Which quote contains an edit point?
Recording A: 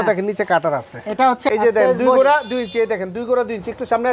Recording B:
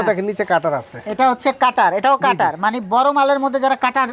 A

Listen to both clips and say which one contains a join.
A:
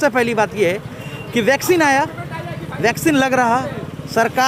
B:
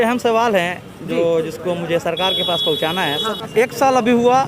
B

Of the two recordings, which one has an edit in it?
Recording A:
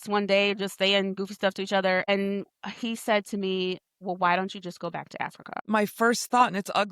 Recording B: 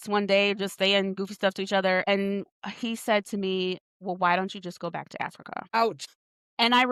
A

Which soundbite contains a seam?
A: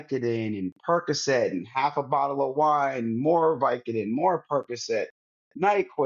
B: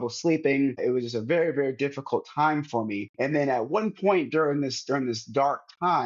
B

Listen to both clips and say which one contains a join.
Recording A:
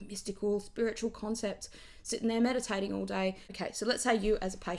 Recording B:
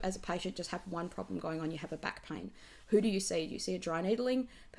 A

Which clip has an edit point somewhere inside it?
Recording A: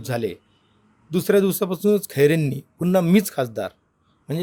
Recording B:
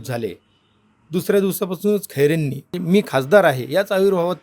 B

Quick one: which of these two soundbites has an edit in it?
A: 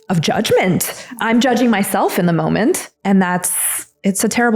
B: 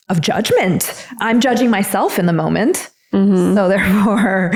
A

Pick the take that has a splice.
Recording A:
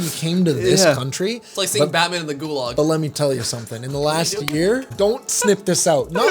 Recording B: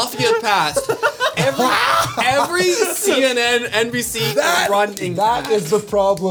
A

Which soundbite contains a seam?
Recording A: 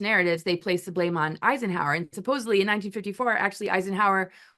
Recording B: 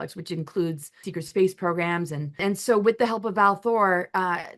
B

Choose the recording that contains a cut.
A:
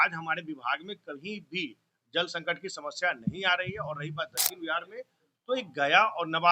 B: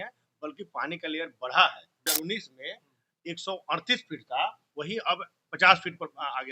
B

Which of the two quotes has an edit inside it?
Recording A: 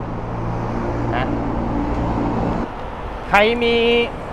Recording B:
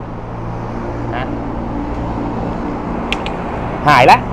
A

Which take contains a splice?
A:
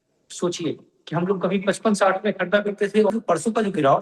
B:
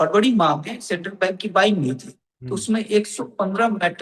A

